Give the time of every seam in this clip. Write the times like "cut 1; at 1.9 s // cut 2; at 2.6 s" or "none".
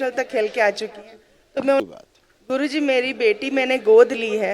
cut 1; at 1.8 s